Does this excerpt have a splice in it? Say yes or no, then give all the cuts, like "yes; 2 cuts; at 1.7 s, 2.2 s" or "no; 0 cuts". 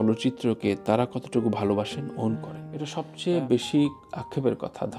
yes; 1 cut; at 2.5 s